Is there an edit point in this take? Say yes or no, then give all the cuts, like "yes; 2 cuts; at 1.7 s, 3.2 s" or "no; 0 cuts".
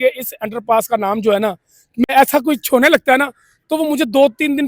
yes; 1 cut; at 2.1 s